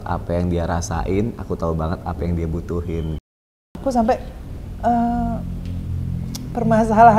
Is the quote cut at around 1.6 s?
no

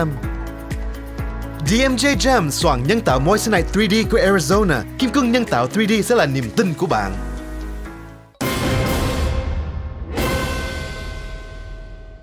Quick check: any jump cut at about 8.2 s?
yes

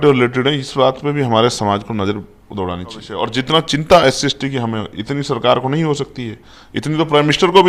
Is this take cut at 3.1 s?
yes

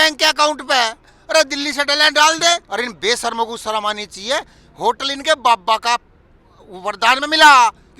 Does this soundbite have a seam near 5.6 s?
no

